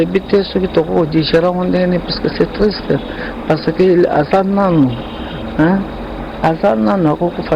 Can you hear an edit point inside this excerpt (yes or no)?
no